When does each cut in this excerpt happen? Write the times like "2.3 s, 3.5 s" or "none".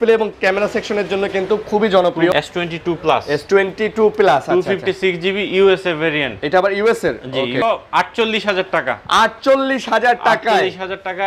2.3 s, 7.6 s